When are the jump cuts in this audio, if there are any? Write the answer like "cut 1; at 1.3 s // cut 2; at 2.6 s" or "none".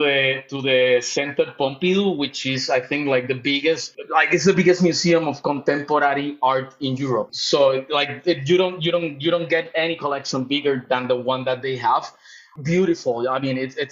cut 1; at 3.9 s // cut 2; at 7.4 s // cut 3; at 12.4 s

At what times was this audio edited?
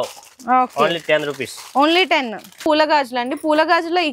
cut 1; at 2.6 s

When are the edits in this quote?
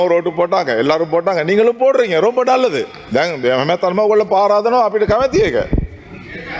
none

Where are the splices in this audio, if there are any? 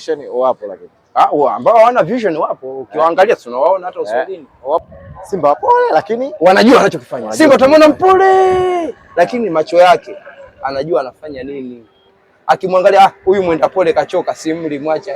cut 1; at 4.8 s

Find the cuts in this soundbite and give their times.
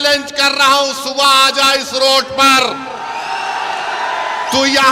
none

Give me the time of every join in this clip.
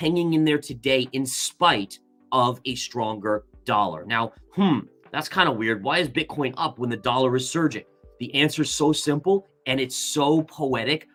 none

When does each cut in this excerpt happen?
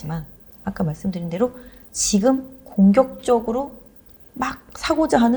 none

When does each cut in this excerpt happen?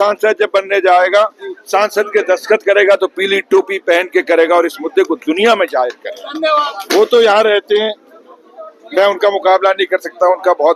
cut 1; at 6.7 s

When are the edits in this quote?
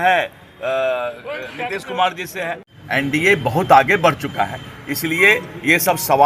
cut 1; at 2.7 s

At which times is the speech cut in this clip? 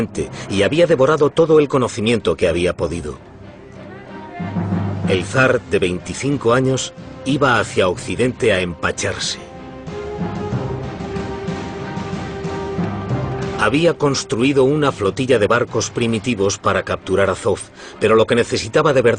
cut 1; at 13.3 s

